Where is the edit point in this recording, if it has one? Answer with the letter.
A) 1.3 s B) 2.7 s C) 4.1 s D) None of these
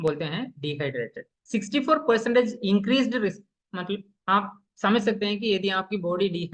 A